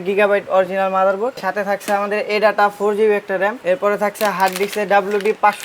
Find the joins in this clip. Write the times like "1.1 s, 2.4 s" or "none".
1.4 s, 3.6 s